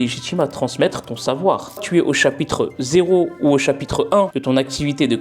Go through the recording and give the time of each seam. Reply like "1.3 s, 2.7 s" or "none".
1.8 s, 4.4 s